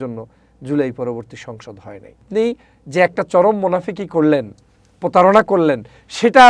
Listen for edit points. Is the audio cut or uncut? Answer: cut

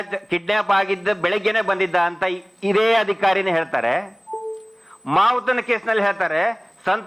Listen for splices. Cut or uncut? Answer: uncut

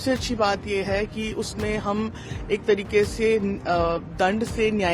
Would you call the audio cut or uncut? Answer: uncut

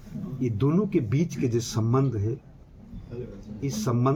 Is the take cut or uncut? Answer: uncut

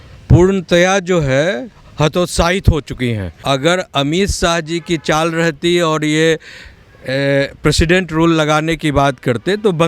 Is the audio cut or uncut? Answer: cut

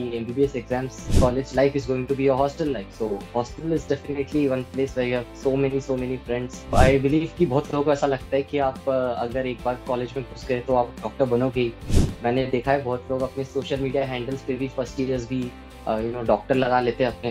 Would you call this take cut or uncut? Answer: cut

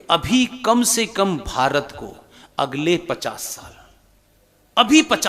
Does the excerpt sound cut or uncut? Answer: uncut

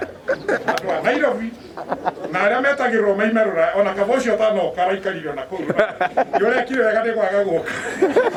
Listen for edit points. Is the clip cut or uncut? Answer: uncut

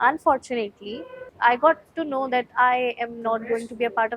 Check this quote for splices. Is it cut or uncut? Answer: cut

